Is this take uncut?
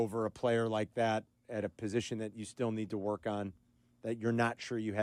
yes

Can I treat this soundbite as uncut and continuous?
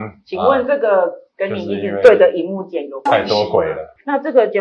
yes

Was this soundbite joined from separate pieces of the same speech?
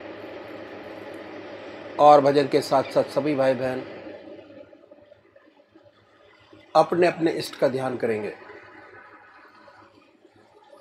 no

